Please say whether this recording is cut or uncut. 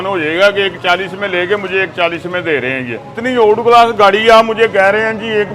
cut